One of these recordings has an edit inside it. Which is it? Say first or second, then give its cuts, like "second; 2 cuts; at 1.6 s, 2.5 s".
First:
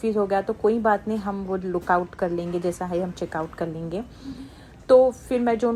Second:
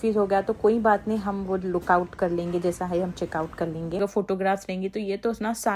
second; 1 cut; at 4.0 s